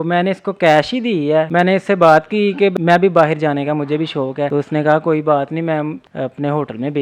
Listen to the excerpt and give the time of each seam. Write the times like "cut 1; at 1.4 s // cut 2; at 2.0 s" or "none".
cut 1; at 1.5 s // cut 2; at 2.7 s // cut 3; at 4.5 s // cut 4; at 6.0 s